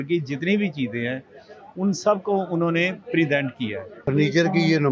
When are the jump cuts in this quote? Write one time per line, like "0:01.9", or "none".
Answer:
0:04.0